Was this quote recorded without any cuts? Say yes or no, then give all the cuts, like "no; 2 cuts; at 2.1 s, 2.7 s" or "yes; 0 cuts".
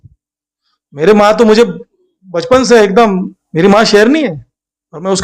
no; 1 cut; at 3.4 s